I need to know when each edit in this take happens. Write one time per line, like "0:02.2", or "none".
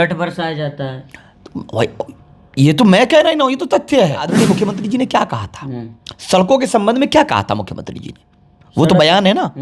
0:04.3

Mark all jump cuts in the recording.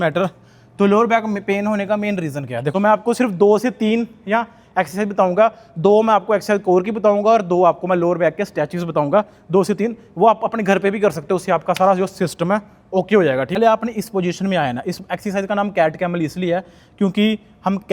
0:02.7
0:13.6

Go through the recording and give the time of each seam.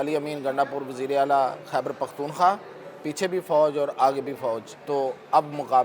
0:04.7

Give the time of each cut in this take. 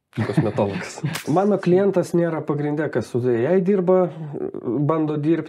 0:01.2

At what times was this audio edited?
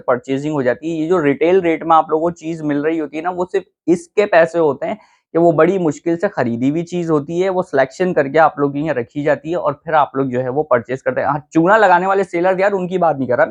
none

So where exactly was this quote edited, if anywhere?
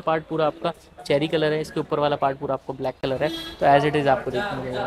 none

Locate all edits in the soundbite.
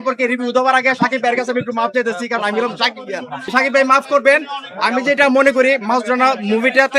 0:03.5

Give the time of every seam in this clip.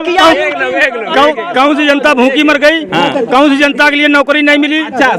none

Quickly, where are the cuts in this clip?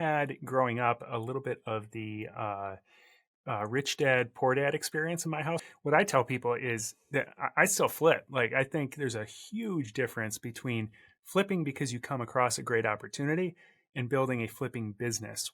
0:05.6

